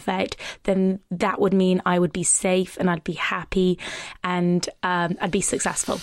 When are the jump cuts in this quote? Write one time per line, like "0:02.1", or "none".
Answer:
none